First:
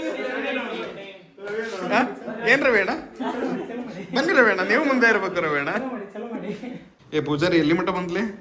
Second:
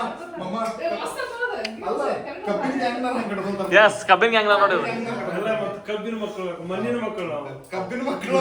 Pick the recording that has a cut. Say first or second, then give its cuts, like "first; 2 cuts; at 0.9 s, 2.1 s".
first; 1 cut; at 6.9 s